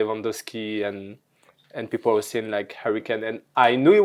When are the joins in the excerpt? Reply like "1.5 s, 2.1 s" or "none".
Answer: none

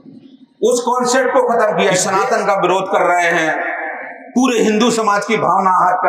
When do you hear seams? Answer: 2.1 s

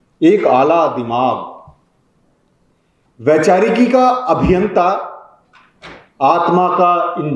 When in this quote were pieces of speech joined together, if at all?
none

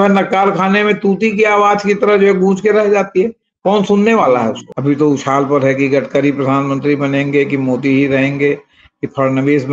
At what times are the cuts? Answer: 4.7 s

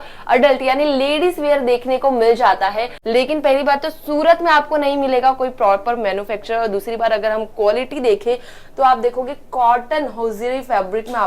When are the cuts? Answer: 2.9 s

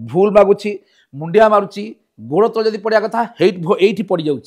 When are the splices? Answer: none

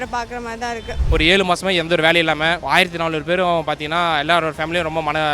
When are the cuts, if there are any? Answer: 1.0 s, 2.6 s

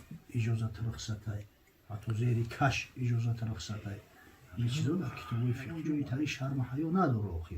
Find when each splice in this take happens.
5.7 s

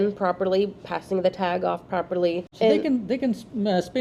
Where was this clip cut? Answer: 2.5 s

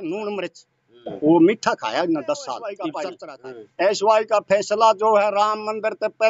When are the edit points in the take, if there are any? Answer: 3.0 s

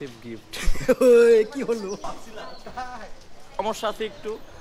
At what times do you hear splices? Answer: 2.0 s, 3.6 s

